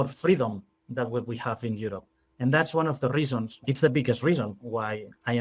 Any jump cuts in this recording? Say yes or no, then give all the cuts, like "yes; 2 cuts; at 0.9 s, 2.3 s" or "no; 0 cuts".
yes; 1 cut; at 3.7 s